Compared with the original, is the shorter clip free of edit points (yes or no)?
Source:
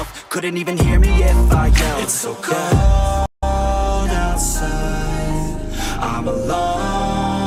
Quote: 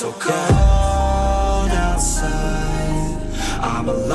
no